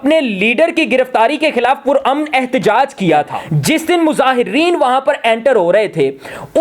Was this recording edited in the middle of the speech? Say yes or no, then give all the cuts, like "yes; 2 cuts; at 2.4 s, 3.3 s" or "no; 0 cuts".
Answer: yes; 1 cut; at 3.4 s